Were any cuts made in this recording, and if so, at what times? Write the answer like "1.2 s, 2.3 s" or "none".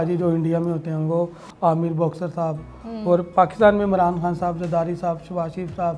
none